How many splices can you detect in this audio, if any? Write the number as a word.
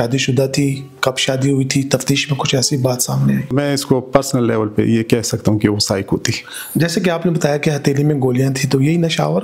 one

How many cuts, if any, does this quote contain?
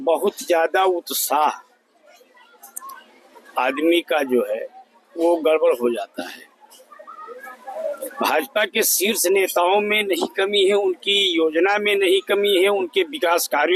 zero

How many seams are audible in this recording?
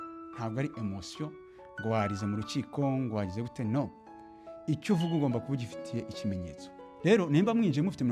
one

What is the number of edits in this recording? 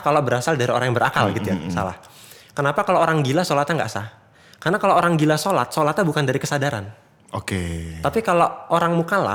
zero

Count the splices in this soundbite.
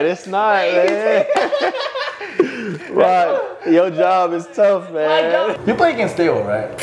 one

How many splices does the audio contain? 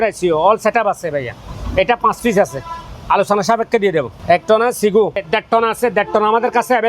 two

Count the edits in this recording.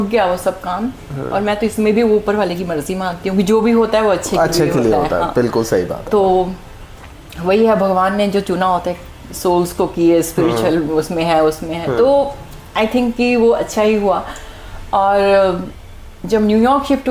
zero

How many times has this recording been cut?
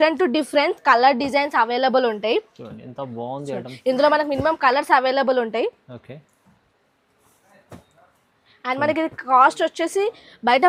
zero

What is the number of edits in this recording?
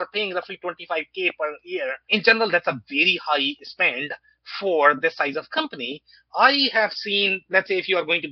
one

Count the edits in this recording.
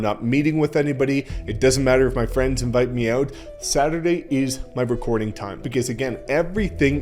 one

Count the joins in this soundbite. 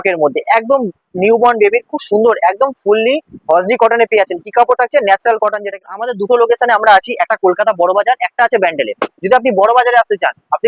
one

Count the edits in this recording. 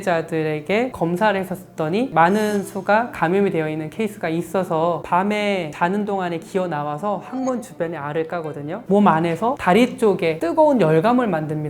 three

